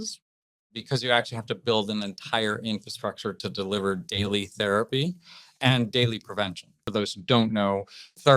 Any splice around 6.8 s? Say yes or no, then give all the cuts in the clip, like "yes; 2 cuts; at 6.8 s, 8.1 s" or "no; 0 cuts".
yes; 1 cut; at 6.8 s